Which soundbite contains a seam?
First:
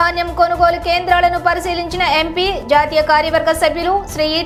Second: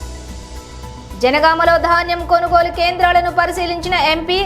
second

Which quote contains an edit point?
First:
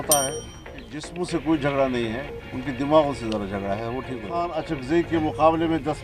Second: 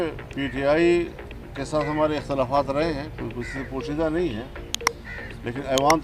first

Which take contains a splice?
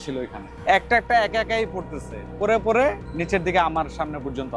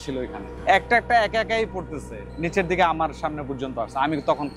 second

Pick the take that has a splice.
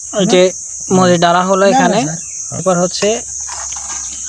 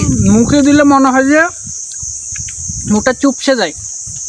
first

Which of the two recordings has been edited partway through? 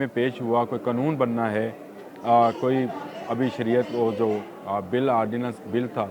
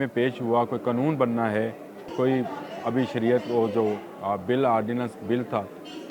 second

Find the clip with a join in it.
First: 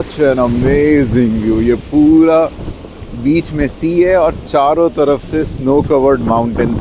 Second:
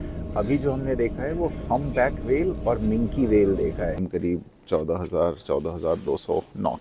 second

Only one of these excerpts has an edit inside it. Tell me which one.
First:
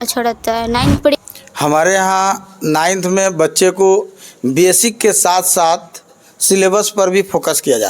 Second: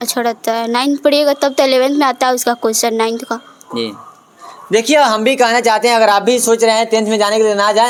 first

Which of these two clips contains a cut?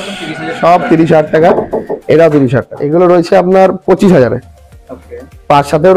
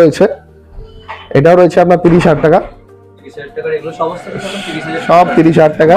first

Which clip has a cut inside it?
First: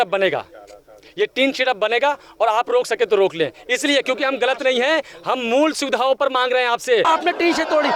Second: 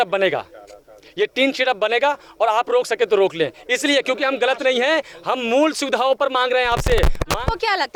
first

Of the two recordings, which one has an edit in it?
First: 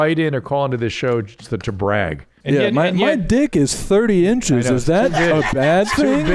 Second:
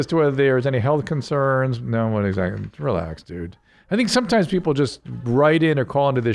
first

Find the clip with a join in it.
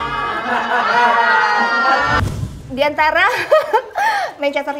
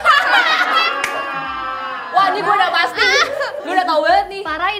first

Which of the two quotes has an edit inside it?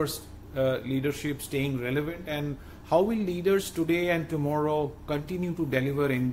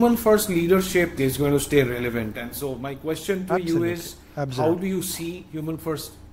second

